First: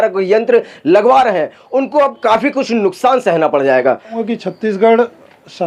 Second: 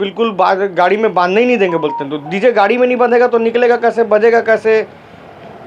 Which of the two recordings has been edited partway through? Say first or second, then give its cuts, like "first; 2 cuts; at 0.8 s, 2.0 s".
first; 1 cut; at 4.2 s